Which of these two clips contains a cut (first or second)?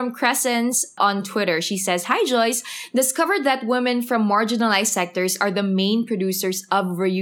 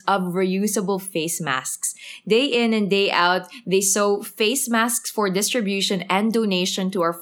first